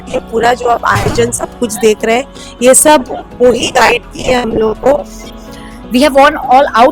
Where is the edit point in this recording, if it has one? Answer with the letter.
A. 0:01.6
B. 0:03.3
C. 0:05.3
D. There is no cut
C